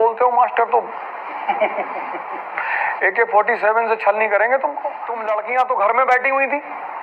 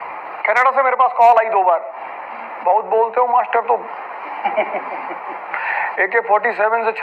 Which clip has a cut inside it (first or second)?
first